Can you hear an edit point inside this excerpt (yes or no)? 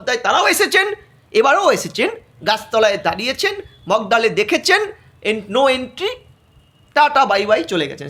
no